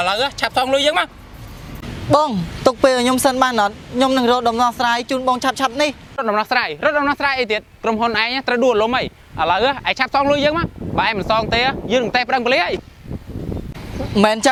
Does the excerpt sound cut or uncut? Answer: uncut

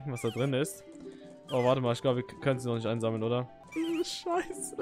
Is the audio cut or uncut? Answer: cut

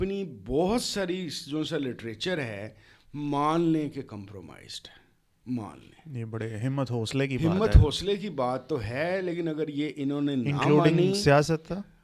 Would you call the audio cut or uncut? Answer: uncut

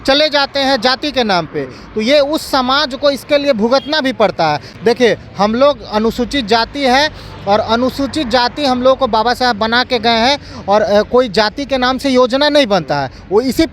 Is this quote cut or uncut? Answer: uncut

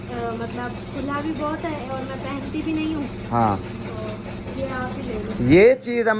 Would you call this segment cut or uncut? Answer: uncut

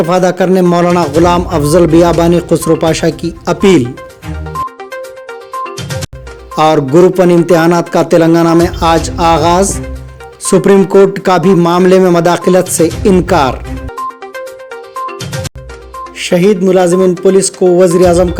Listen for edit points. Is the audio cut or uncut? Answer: uncut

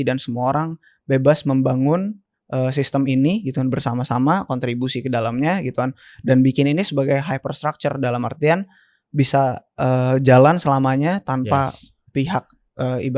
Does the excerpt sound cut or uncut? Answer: uncut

